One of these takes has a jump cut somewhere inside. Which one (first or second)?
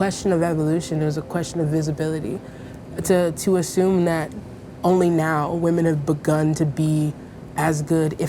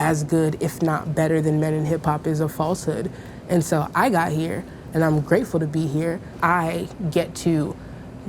second